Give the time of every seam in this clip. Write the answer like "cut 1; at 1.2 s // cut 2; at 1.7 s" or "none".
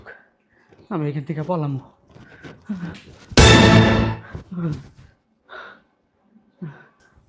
cut 1; at 3.1 s // cut 2; at 4.3 s